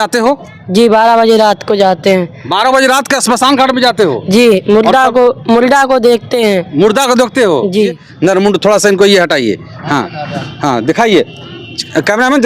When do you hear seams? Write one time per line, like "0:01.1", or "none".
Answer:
0:08.1